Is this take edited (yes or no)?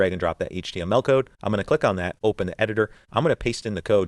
no